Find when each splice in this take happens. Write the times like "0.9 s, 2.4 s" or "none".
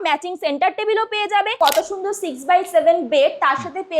1.6 s